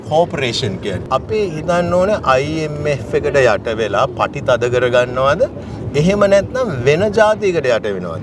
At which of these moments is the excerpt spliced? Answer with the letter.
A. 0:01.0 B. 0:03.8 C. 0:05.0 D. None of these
A